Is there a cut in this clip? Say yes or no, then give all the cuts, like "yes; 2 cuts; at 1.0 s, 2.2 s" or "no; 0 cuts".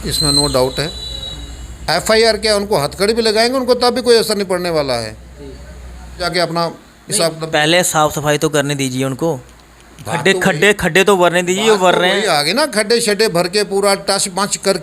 yes; 1 cut; at 6.2 s